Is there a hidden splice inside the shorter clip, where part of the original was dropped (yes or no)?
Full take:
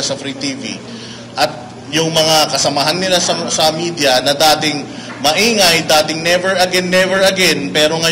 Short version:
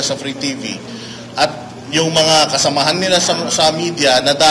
no